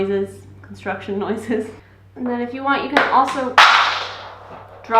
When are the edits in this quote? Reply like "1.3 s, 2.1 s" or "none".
1.8 s